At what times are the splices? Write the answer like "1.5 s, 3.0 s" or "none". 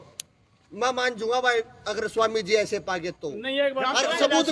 none